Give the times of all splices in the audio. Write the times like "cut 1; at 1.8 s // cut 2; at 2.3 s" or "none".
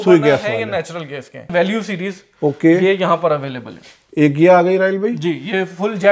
cut 1; at 1.5 s